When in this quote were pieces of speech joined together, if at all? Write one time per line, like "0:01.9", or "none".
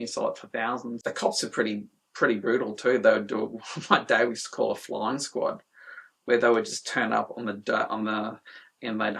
0:00.9